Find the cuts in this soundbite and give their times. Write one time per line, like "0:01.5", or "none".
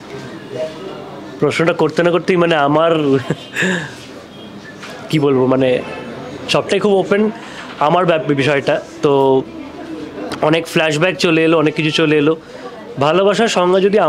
none